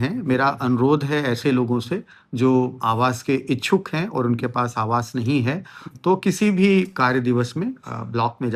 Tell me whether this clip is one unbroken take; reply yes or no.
yes